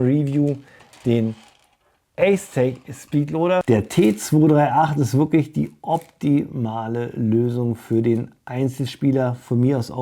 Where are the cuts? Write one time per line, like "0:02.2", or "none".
0:03.6